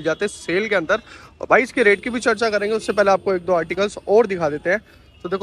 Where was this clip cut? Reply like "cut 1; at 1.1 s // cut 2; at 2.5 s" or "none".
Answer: none